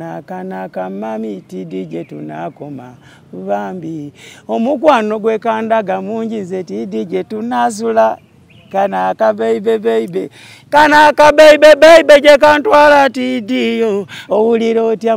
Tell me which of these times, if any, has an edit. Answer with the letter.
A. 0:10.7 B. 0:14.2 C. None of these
B